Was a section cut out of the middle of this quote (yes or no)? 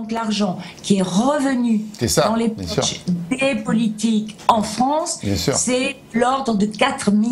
no